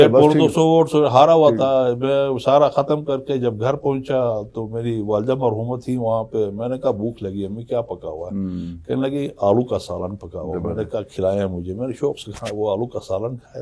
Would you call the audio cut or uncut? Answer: uncut